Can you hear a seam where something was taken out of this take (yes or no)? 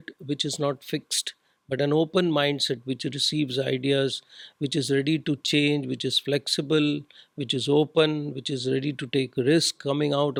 no